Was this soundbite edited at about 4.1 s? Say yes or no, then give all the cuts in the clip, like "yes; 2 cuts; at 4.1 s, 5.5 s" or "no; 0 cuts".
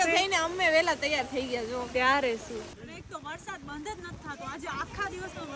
no; 1 cut; at 2.7 s